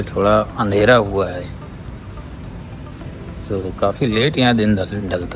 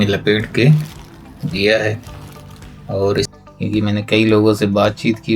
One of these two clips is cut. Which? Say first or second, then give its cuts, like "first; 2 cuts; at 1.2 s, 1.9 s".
second; 1 cut; at 3.3 s